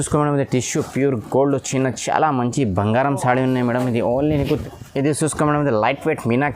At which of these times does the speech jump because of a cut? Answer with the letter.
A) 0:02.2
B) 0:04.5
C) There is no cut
B